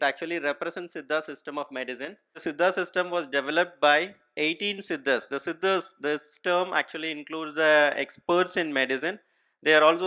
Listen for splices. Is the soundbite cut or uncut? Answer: cut